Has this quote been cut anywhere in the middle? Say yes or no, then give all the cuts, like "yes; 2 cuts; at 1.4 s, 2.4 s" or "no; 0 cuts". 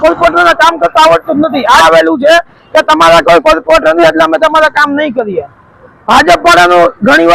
yes; 1 cut; at 1.8 s